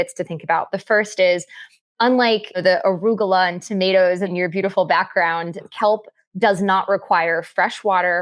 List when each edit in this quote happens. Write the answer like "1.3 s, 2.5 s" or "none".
2.6 s, 4.3 s, 5.6 s